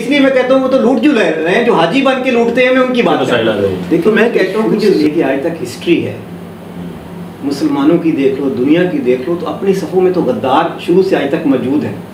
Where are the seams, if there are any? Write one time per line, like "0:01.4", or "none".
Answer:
0:04.9